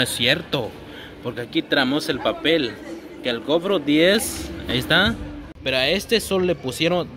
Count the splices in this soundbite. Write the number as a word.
one